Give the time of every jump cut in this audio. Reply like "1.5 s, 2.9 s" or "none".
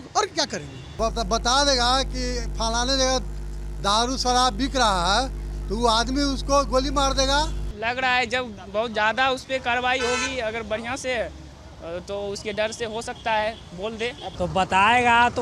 0.9 s, 7.6 s, 14.2 s